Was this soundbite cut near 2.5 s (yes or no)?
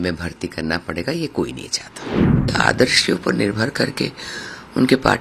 yes